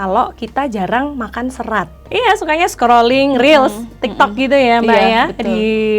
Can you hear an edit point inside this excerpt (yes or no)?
yes